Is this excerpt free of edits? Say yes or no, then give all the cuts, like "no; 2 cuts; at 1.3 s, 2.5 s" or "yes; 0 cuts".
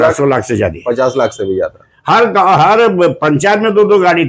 yes; 0 cuts